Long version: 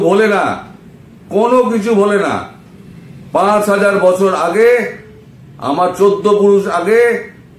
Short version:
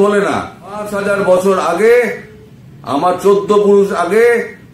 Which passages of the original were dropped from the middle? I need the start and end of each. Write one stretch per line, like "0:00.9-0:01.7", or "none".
0:02.9-0:03.7

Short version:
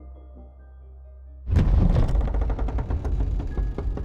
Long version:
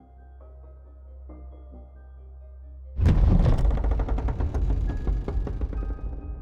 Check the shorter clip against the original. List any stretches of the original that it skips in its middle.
0:02.7-0:02.8

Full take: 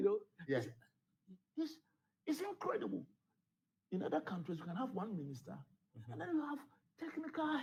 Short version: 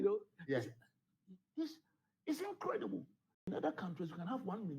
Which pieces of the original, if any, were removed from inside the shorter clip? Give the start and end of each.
0:03.3-0:03.8

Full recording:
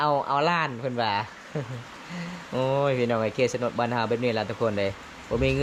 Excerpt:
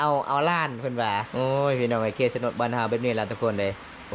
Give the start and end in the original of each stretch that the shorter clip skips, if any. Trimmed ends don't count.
0:01.3-0:02.5

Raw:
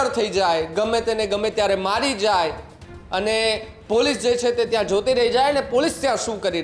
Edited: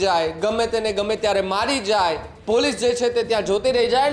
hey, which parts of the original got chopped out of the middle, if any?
0:02.7-0:03.7

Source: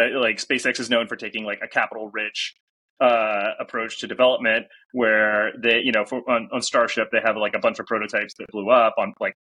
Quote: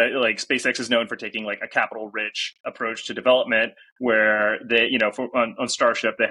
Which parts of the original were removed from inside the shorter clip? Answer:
0:02.7-0:03.6

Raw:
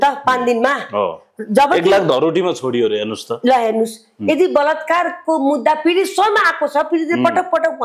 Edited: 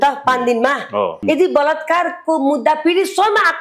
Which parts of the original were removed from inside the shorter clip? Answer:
0:01.2-0:04.2

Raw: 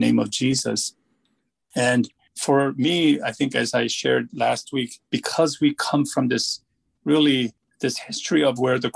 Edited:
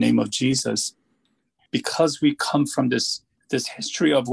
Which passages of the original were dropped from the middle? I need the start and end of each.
0:01.6-0:05.0
0:06.7-0:07.6

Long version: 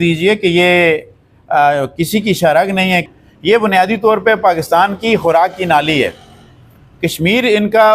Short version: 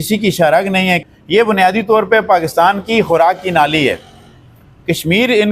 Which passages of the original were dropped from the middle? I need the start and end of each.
0:03.2-0:03.3

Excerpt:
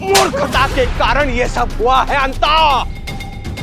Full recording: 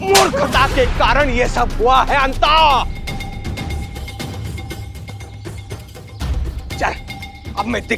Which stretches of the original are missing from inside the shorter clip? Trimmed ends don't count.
none

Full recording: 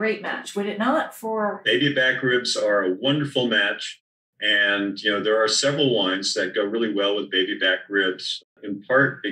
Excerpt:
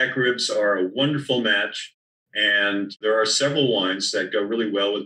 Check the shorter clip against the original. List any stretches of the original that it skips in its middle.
0:05.1-0:05.2

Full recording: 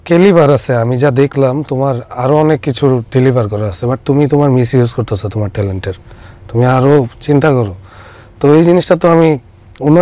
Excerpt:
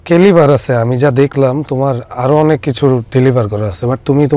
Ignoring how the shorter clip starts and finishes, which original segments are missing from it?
none

